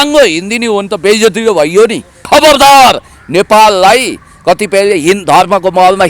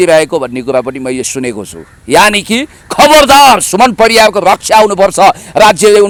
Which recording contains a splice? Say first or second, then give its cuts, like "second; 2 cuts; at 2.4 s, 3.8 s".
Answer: first; 1 cut; at 2.1 s